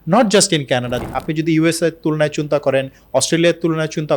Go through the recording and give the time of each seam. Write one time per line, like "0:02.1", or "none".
0:01.0